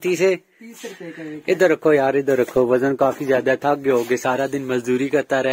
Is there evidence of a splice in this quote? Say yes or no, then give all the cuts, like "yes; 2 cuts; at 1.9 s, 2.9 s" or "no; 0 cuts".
no; 0 cuts